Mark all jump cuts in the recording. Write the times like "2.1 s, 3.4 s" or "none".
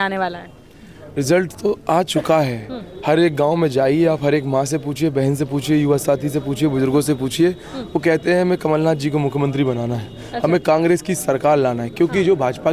none

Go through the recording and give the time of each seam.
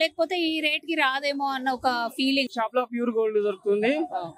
2.5 s

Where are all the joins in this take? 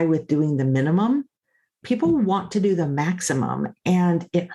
1.8 s

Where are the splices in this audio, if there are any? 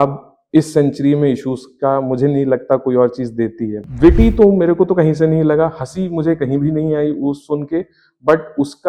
3.8 s

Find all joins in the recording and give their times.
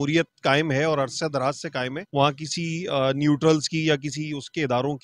2.0 s

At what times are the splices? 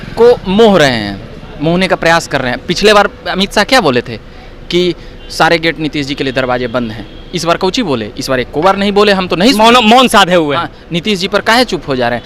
none

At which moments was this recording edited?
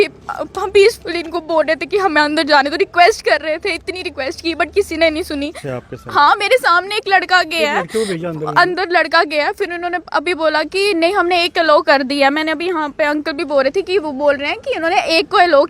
5.7 s

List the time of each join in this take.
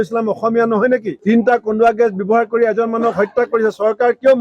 none

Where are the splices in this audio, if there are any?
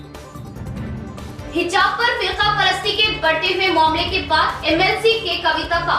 1.2 s

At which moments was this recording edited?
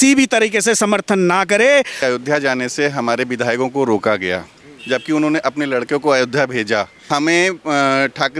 2.0 s, 7.0 s

